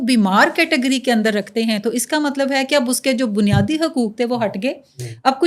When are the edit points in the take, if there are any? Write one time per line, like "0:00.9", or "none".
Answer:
none